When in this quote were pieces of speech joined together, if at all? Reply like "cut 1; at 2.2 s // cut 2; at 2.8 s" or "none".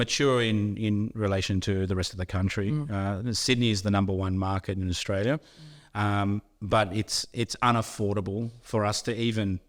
none